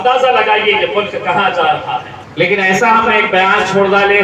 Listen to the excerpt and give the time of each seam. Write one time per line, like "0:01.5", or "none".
0:02.2

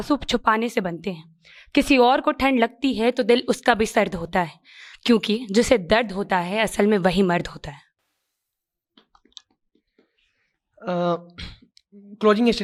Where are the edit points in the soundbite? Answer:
none

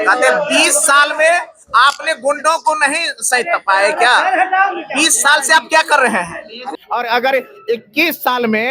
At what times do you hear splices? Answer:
0:06.7

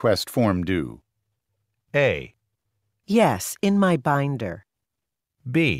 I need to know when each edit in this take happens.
0:01.3
0:04.8

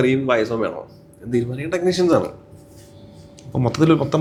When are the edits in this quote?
none

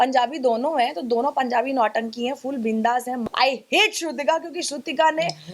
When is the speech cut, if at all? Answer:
0:03.2

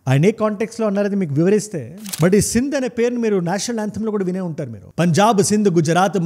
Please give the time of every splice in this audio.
0:02.0

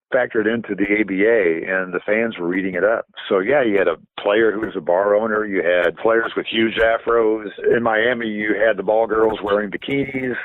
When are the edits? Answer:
0:06.0
0:07.6

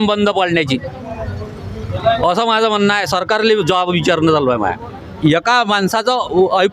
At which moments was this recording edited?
0:05.1

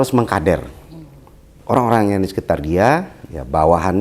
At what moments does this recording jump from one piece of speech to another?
0:01.5

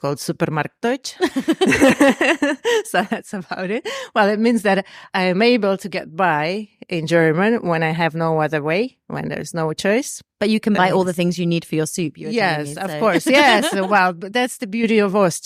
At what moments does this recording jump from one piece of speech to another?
none

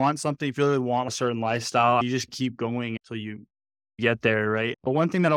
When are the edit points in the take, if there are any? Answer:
0:01.1
0:04.0

